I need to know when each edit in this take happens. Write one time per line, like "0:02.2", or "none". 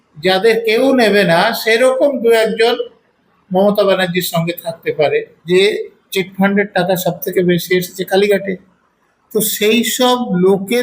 0:05.4